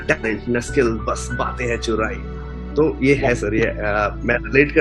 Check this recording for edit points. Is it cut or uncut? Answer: uncut